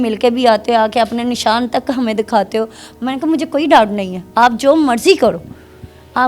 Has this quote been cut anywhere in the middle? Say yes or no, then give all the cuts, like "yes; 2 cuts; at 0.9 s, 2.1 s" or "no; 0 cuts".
no; 0 cuts